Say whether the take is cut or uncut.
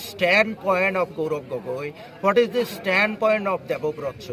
uncut